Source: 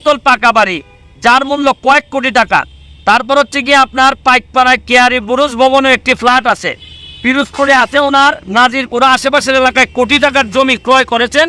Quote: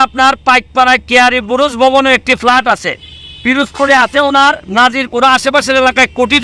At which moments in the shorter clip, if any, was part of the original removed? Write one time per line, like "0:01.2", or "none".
none